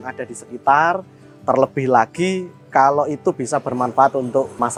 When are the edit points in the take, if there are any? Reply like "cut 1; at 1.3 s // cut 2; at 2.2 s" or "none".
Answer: none